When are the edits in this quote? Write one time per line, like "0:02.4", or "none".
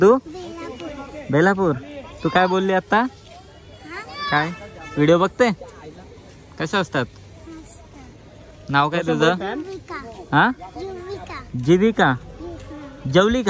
none